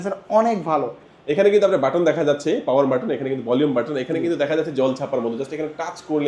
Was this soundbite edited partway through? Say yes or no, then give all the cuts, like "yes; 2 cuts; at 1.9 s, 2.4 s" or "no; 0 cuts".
yes; 1 cut; at 1.2 s